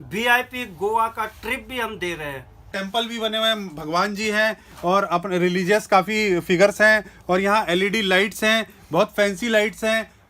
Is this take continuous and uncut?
no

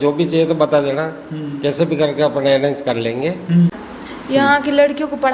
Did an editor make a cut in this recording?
yes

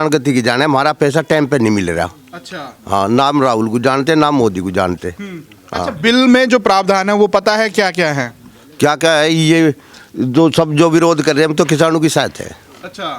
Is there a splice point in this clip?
no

